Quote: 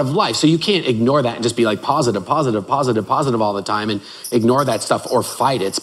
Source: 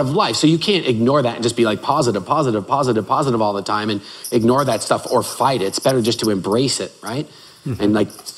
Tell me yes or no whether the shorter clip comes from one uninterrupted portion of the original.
yes